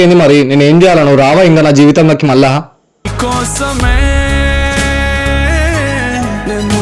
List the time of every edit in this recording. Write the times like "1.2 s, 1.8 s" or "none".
none